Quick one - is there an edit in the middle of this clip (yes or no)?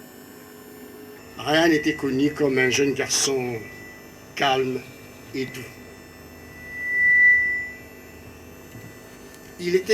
yes